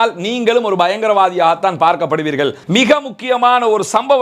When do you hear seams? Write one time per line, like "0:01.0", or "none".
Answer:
0:02.6